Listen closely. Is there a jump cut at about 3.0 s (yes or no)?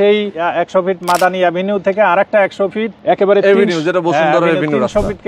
no